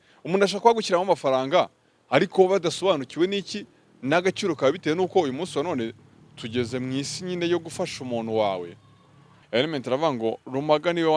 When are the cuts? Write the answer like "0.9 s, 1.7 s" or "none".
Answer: 9.4 s